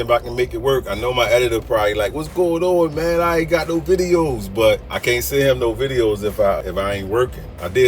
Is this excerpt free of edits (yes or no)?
no